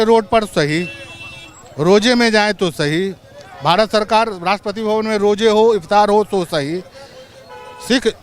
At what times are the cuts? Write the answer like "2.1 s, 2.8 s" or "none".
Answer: none